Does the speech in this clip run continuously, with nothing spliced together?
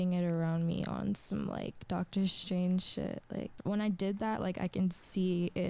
no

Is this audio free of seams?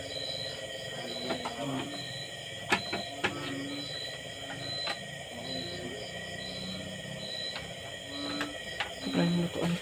yes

